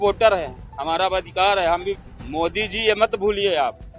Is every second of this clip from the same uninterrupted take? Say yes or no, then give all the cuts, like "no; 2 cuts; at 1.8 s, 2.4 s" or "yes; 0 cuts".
no; 1 cut; at 2.0 s